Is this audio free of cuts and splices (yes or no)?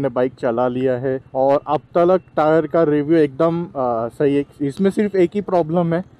no